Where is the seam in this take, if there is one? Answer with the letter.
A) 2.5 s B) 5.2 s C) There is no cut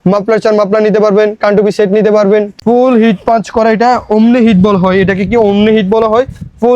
A